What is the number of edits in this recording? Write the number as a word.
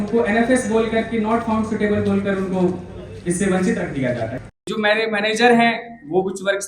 one